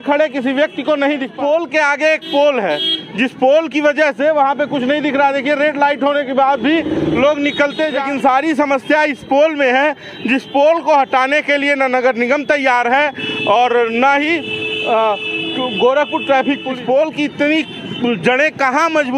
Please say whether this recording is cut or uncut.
cut